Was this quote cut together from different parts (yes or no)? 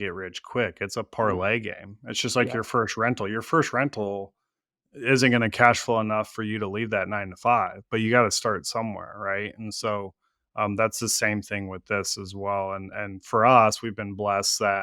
no